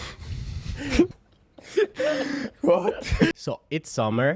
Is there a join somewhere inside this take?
yes; 1 cut; at 3.3 s

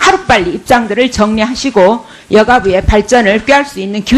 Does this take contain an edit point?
no; 0 cuts

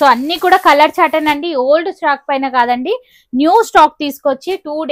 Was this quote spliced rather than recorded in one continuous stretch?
no; 0 cuts

